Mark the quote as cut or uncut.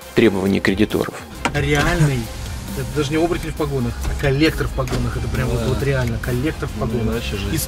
cut